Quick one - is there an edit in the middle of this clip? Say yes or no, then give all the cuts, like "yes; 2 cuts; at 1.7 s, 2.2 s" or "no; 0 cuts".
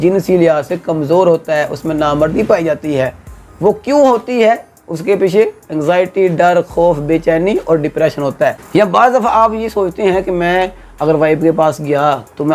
yes; 1 cut; at 8.6 s